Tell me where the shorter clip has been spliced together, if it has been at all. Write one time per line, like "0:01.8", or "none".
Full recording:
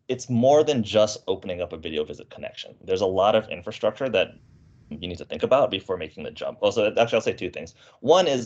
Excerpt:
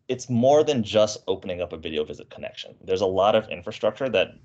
none